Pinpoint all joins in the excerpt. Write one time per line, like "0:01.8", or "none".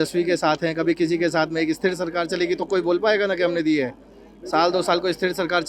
none